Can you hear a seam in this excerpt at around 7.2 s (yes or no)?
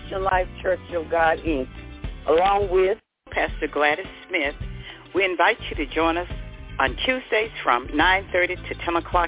no